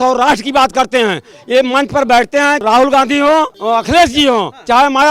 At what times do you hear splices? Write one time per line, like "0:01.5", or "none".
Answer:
0:02.6
0:03.5